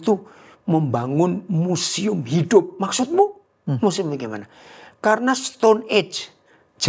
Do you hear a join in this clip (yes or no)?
no